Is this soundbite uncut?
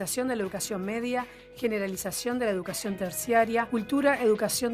no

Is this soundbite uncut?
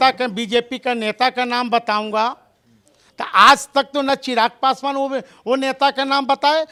yes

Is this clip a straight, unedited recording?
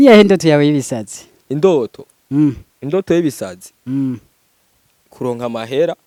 yes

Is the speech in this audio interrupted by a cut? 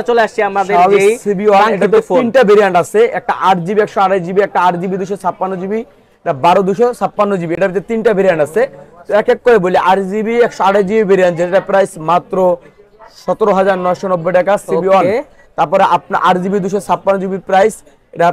no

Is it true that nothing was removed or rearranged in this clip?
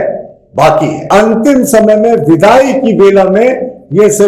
no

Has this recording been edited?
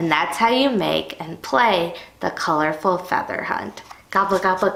no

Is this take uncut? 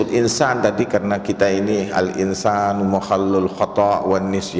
yes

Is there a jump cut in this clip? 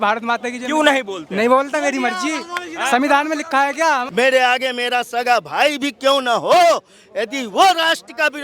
yes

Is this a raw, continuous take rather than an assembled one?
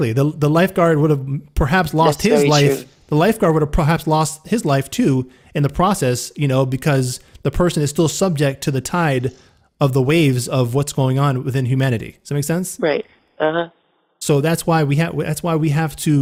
yes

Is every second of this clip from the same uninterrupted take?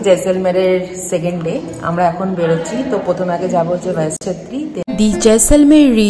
no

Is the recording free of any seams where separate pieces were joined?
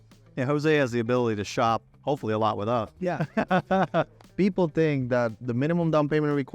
no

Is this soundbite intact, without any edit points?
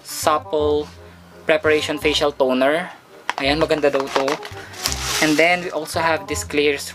yes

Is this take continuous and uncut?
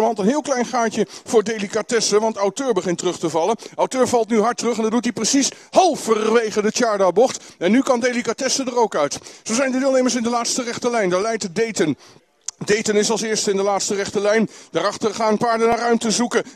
yes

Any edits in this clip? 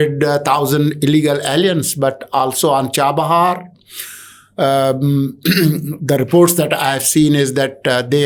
no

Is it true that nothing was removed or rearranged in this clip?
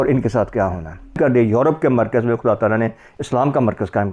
no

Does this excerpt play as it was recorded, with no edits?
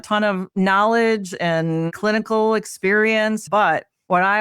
no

